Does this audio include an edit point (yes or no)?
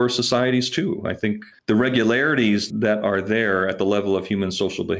yes